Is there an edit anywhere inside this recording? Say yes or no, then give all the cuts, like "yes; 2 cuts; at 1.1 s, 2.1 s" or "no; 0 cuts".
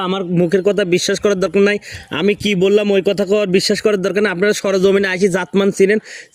no; 0 cuts